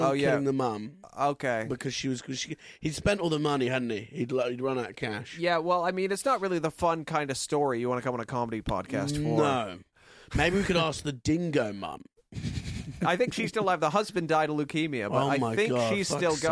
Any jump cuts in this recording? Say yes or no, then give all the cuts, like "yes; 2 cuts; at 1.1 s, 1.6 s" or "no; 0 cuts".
no; 0 cuts